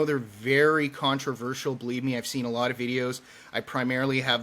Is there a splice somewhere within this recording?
no; 0 cuts

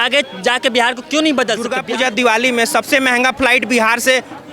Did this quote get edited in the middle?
yes; 1 cut; at 1.7 s

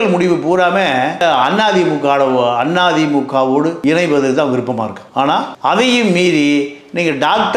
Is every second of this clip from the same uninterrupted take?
yes; 0 cuts

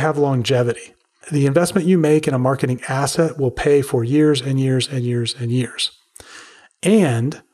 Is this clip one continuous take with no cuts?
no; 1 cut; at 1.2 s

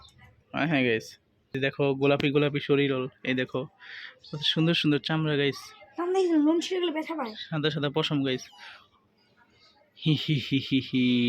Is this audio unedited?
no; 1 cut; at 1.6 s

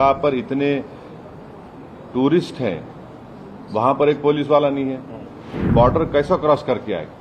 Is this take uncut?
no; 1 cut; at 5.6 s

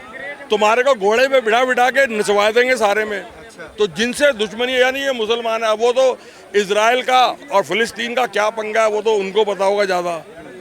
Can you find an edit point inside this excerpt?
no; 0 cuts

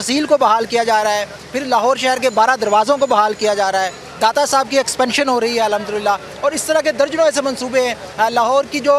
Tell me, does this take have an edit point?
no; 0 cuts

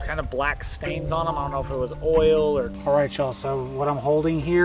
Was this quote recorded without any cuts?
no; 1 cut; at 2.7 s

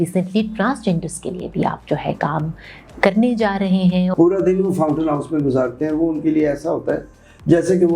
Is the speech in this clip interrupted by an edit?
yes; 1 cut; at 4.1 s

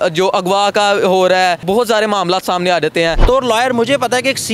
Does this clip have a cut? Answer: yes; 2 cuts; at 1.6 s, 3.2 s

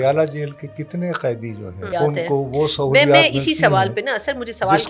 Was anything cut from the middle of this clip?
yes; 1 cut; at 1.9 s

